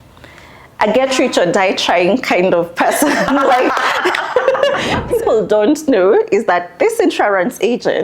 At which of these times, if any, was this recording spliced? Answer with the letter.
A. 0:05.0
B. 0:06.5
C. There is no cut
A